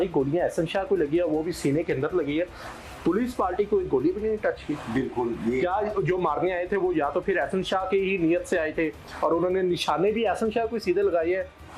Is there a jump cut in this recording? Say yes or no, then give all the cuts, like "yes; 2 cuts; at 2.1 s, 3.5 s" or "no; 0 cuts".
no; 0 cuts